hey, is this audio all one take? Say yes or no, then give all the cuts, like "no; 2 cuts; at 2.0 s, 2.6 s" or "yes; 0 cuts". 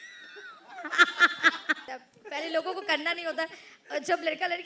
no; 1 cut; at 1.8 s